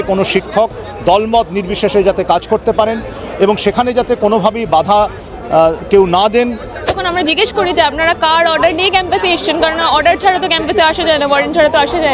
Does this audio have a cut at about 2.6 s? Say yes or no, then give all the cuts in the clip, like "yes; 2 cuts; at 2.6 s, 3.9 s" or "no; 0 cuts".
no; 1 cut; at 7.0 s